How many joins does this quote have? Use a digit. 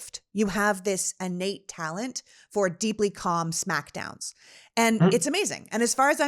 0